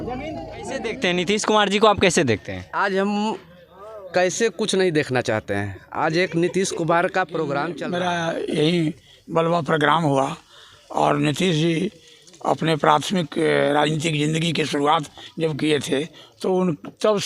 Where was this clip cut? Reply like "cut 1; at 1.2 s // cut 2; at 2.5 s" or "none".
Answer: cut 1; at 0.9 s // cut 2; at 7.7 s